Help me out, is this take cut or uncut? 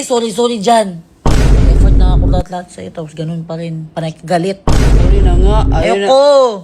uncut